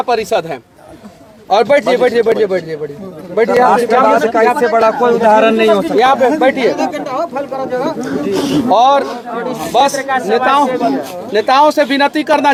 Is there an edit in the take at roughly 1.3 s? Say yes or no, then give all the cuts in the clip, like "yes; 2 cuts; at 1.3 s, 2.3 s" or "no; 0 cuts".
no; 0 cuts